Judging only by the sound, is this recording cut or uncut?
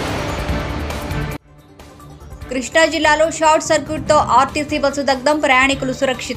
uncut